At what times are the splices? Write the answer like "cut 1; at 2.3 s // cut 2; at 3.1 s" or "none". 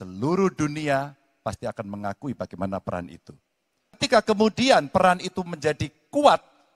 cut 1; at 4.0 s